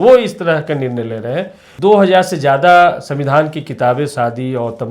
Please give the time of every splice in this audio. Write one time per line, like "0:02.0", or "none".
0:01.6